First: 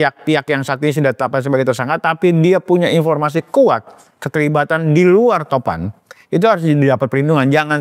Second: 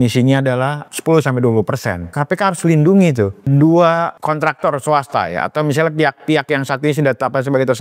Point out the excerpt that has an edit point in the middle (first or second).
second